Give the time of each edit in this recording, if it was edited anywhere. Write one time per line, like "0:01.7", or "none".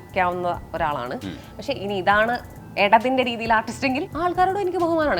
0:04.1